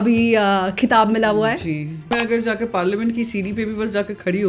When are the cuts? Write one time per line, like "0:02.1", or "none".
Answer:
0:02.1